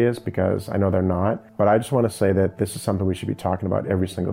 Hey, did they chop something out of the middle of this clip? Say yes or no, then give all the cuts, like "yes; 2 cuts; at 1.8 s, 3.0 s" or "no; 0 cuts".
yes; 1 cut; at 1.5 s